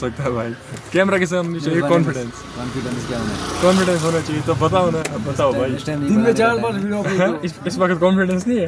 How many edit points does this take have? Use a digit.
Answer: 0